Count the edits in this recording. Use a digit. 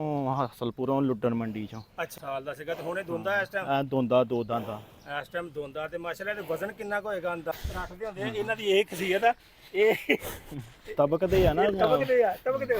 2